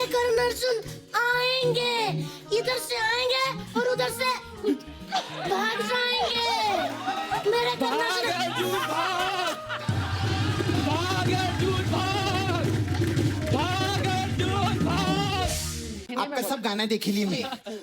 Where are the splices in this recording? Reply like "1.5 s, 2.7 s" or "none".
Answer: 16.1 s